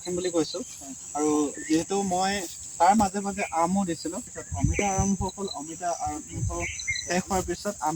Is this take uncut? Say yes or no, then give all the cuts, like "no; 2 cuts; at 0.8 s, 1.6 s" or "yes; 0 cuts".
no; 1 cut; at 4.3 s